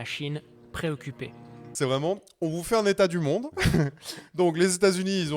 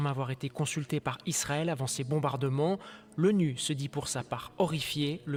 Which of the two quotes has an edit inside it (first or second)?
first